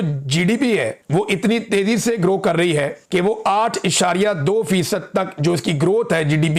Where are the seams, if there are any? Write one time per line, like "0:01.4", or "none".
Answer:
none

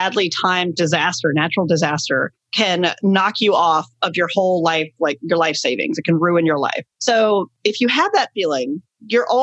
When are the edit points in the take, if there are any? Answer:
0:06.9

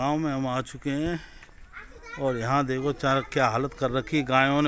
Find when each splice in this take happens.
none

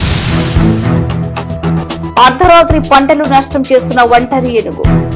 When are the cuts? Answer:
0:00.9

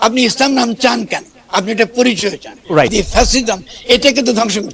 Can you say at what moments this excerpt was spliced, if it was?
0:02.9

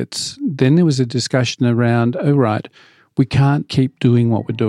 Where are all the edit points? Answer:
0:03.7

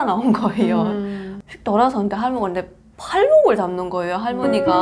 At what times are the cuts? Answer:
0:01.2

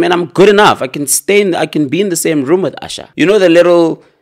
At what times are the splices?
0:03.0

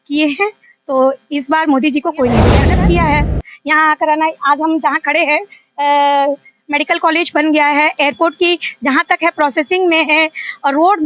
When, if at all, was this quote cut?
0:02.7

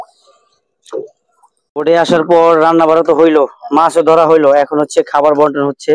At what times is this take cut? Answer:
0:01.7

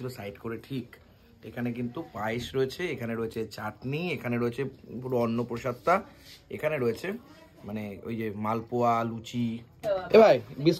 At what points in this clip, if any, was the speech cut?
0:09.7

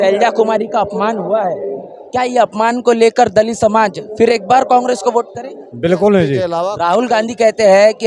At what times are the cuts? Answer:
0:06.6

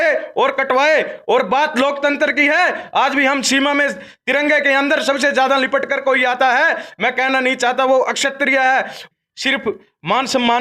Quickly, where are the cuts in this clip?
0:09.0

